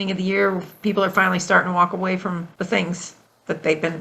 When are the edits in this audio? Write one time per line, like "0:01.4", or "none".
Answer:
0:02.5